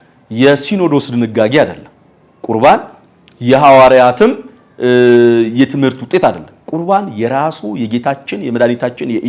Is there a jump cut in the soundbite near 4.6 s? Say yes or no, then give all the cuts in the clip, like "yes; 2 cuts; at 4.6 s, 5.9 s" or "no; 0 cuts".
no; 0 cuts